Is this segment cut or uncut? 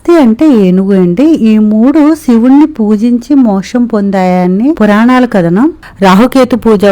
cut